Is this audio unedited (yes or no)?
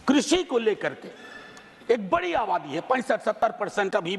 yes